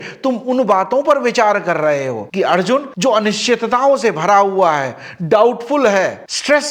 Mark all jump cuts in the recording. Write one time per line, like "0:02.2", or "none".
0:02.3